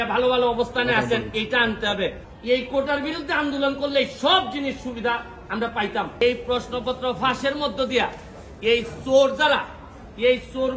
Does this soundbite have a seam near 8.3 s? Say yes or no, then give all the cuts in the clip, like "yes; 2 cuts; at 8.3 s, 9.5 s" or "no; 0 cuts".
no; 2 cuts; at 2.3 s, 6.2 s